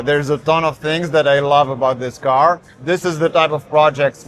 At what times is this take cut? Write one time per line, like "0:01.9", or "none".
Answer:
0:02.7